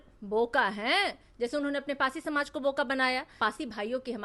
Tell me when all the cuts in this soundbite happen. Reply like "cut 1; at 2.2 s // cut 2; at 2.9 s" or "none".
cut 1; at 3.3 s